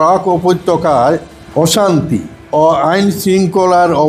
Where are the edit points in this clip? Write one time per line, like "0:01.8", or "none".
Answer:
0:01.4
0:02.4